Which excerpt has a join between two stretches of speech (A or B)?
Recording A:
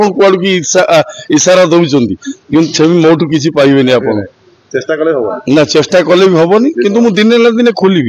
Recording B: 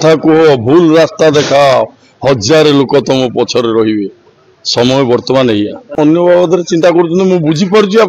B